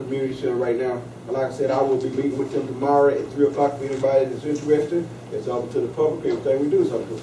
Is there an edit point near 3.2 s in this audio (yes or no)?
yes